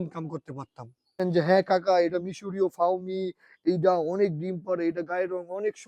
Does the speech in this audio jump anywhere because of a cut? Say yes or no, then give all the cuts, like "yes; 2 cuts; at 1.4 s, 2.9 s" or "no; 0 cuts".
yes; 1 cut; at 1.2 s